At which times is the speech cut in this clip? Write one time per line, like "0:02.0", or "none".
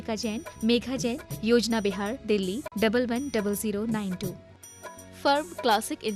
none